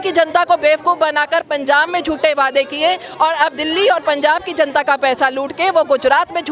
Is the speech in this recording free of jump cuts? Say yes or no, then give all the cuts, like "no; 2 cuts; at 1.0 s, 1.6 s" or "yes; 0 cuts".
yes; 0 cuts